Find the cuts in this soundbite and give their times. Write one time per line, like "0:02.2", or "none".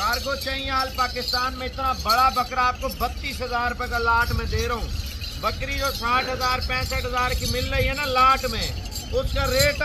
none